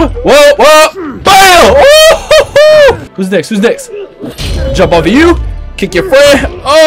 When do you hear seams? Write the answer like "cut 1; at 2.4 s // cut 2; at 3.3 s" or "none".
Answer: cut 1; at 3.1 s